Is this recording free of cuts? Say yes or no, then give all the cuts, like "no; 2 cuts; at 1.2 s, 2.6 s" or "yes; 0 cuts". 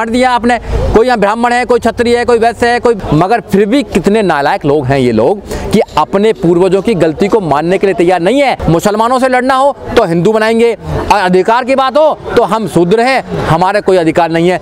no; 2 cuts; at 3.0 s, 8.6 s